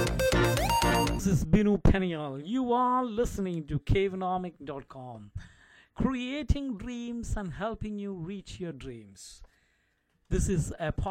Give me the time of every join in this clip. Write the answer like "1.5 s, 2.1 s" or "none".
1.1 s